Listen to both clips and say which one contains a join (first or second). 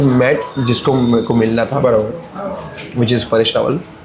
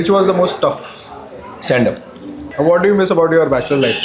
second